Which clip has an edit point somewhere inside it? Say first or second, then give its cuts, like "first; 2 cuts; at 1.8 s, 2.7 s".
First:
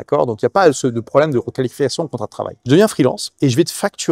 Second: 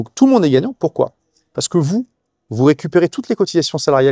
first; 2 cuts; at 2.6 s, 3.3 s